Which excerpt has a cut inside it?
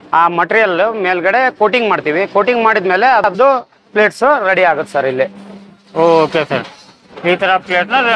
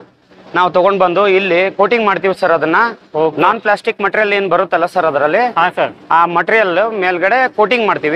first; 1 cut; at 3.3 s

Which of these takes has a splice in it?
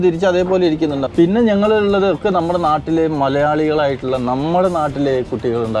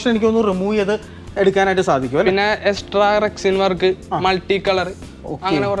first; 1 cut; at 1.0 s

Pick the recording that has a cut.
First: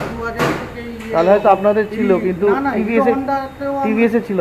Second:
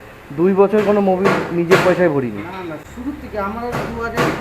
second; 1 cut; at 2.8 s

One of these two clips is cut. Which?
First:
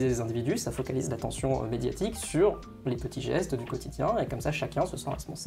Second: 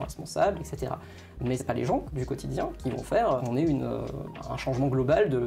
second; 3 cuts; at 1.6 s, 3.4 s, 4.3 s

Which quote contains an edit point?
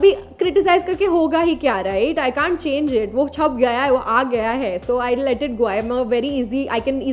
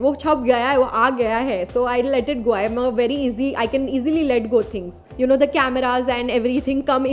second; 1 cut; at 5.0 s

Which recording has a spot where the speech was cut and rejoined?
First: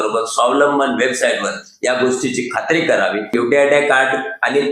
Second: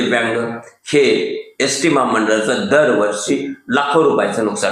first; 1 cut; at 3.3 s

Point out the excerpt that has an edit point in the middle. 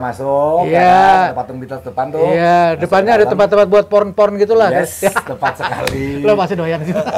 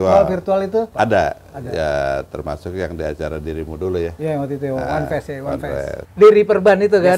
second; 2 cuts; at 0.9 s, 6.0 s

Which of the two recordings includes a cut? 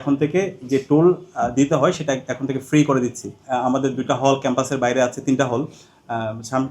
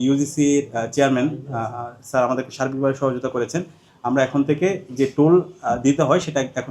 first; 1 cut; at 3.4 s

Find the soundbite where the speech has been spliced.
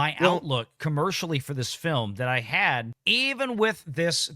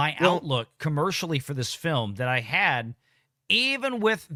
first; 1 cut; at 3.0 s

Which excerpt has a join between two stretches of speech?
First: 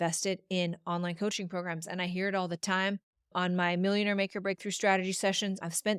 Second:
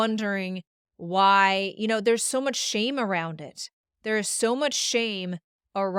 first; 1 cut; at 3.3 s

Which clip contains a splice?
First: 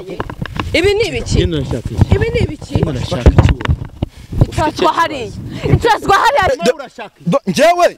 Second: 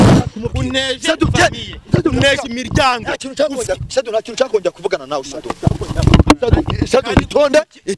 first; 1 cut; at 6.5 s

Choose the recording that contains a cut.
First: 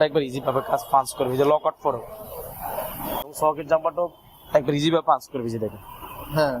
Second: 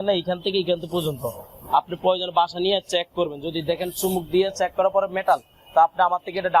first; 1 cut; at 3.3 s

